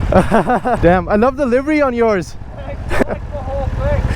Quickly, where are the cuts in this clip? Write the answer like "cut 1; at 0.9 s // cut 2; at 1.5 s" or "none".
cut 1; at 0.8 s // cut 2; at 3.0 s